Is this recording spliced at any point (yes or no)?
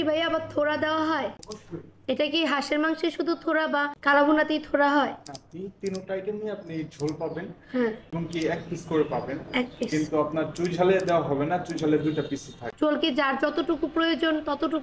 yes